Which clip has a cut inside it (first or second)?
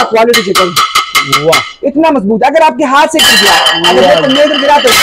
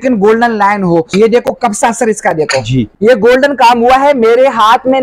second